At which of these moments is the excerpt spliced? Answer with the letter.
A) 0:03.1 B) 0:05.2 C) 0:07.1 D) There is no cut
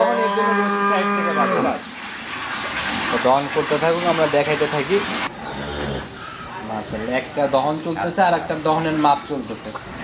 B